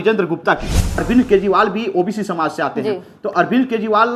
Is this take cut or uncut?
cut